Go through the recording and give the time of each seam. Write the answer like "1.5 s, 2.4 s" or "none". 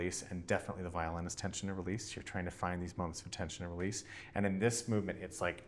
none